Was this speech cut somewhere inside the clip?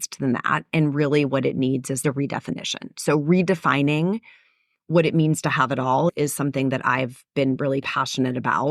yes; 2 cuts; at 2.0 s, 6.1 s

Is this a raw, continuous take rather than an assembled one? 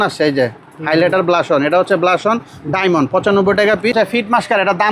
no; 1 cut; at 3.9 s

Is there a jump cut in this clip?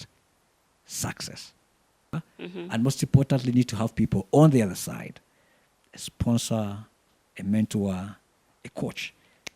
yes; 1 cut; at 2.1 s

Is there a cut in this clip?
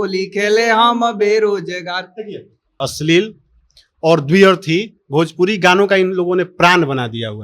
yes; 1 cut; at 2.9 s

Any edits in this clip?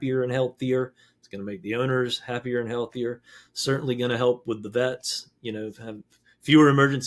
no; 0 cuts

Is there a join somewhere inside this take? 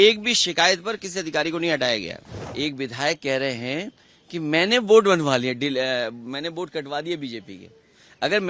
yes; 1 cut; at 2.4 s

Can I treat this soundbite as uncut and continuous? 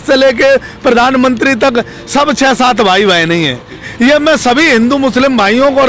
no; 1 cut; at 3.8 s

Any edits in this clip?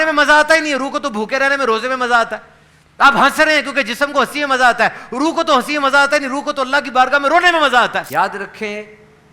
yes; 1 cut; at 8.1 s

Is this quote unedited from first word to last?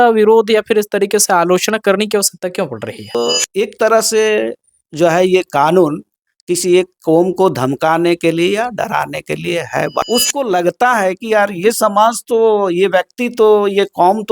no; 2 cuts; at 3.1 s, 10.0 s

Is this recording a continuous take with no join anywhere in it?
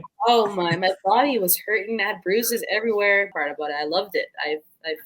no; 1 cut; at 3.3 s

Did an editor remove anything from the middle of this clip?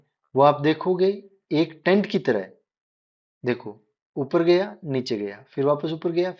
no; 0 cuts

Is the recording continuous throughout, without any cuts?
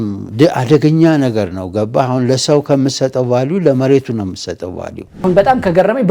no; 1 cut; at 5.2 s

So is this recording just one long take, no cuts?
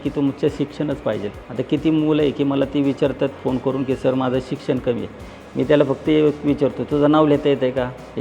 no; 1 cut; at 1.4 s

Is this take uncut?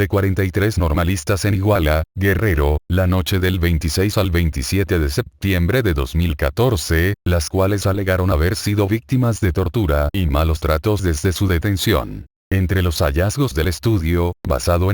yes; 0 cuts

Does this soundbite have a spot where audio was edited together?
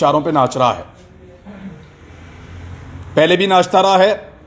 no; 0 cuts

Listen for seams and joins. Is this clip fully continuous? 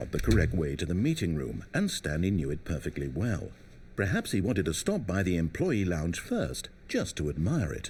yes; 0 cuts

